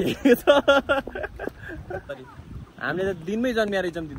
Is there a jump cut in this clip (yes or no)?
yes